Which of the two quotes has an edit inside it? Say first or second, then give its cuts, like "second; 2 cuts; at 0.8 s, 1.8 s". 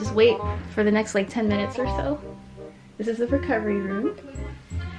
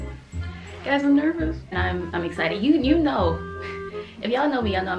second; 1 cut; at 1.7 s